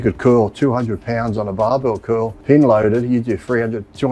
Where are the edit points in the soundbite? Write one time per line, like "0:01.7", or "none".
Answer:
0:02.3